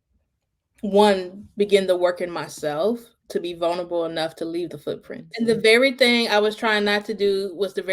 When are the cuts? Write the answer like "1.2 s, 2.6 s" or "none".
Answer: 5.2 s

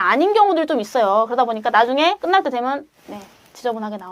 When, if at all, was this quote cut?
2.2 s

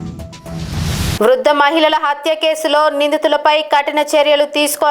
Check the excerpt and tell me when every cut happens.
1.2 s

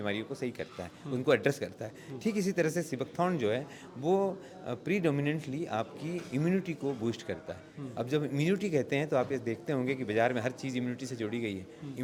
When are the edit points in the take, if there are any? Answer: none

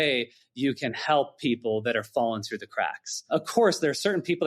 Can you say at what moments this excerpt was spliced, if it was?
3.3 s

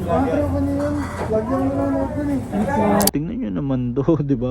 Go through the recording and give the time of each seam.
3.1 s

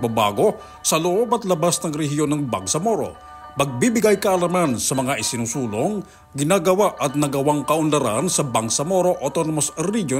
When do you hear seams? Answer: none

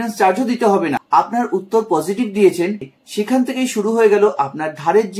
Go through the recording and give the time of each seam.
1.0 s, 3.0 s

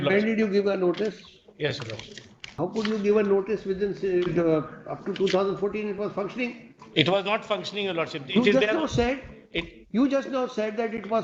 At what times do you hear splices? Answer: 2.5 s

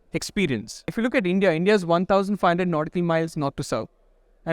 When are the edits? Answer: 0.9 s

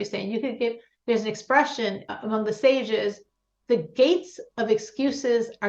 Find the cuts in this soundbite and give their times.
2.0 s

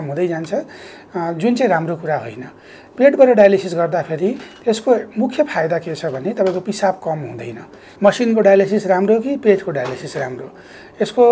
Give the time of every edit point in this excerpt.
7.8 s

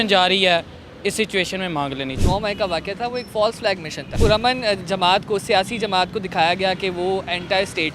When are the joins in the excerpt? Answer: 2.2 s, 4.1 s

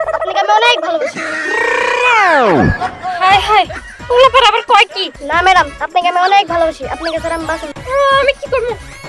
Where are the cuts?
5.0 s, 7.7 s

